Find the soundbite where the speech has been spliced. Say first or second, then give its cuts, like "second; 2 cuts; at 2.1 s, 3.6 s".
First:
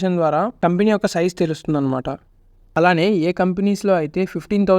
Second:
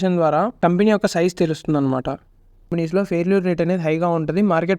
second; 1 cut; at 2.7 s